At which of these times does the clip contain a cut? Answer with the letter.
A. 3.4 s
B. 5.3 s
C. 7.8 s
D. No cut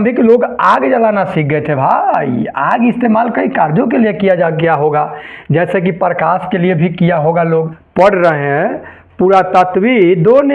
C